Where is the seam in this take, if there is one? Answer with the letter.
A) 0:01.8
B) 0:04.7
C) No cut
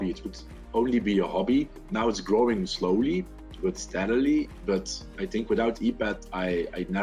A